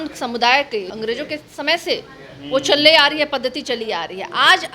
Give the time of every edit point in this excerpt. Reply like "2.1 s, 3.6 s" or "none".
0.9 s